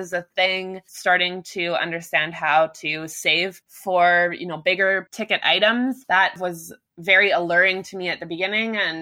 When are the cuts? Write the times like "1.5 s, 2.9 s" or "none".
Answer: 3.7 s, 5.1 s, 6.4 s